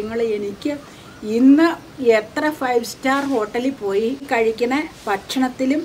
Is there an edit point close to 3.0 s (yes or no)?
no